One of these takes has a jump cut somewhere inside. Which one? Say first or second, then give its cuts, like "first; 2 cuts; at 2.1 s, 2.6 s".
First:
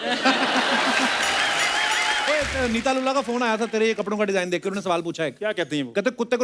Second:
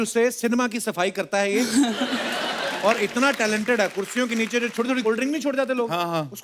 first; 1 cut; at 2.2 s